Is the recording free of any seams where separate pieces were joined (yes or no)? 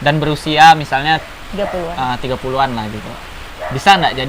yes